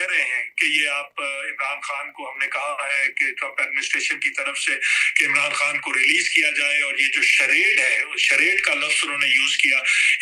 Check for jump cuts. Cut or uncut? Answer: uncut